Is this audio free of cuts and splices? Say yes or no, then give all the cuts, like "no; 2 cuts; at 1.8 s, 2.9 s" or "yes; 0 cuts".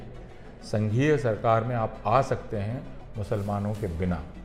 yes; 0 cuts